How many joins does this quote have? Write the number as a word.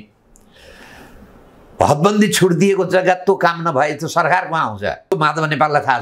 one